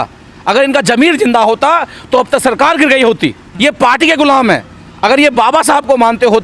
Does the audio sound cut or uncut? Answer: cut